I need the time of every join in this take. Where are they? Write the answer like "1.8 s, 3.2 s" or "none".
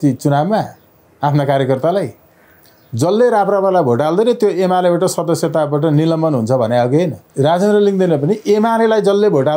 7.2 s

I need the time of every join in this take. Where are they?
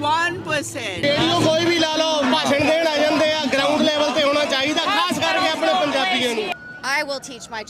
1.0 s, 6.5 s

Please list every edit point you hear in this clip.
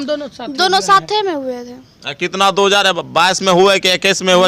none

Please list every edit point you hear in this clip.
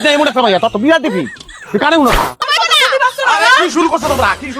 2.4 s

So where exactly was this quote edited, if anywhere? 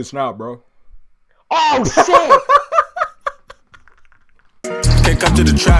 4.7 s

